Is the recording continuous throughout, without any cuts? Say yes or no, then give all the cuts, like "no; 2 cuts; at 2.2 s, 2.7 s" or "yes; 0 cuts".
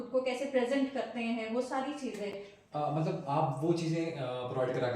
yes; 0 cuts